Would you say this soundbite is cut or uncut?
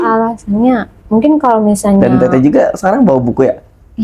cut